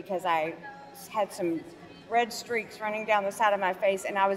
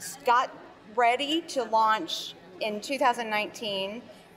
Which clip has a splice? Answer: second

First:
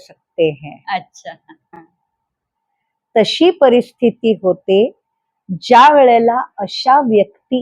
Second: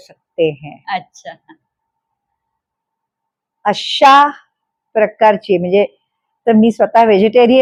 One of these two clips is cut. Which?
first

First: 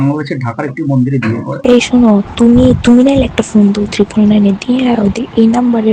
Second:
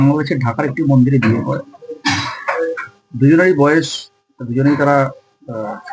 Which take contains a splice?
first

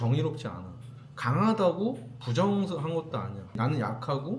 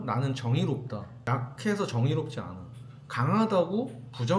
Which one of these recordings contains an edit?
first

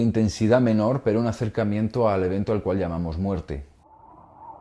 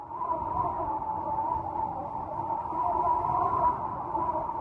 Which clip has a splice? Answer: first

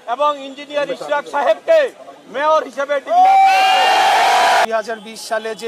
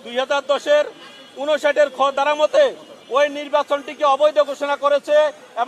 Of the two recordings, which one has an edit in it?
first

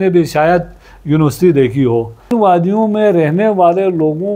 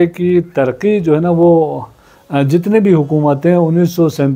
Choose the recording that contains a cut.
first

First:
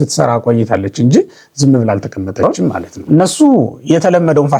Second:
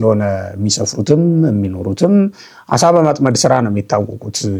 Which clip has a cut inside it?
first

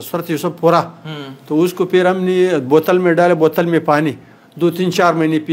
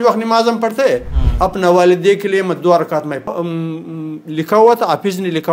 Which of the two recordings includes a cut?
second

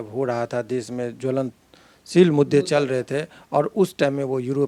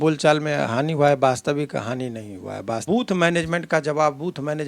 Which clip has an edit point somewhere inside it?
second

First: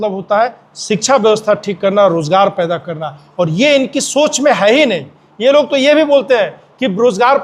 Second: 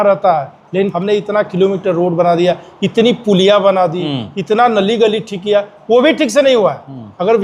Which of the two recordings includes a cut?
second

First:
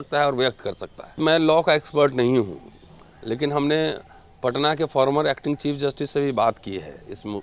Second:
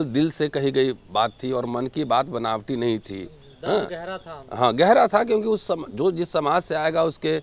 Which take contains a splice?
first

